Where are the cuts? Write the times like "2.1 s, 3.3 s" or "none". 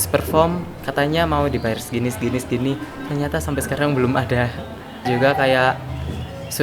5.1 s